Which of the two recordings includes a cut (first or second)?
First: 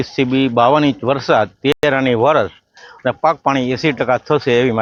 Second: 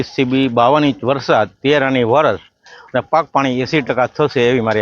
second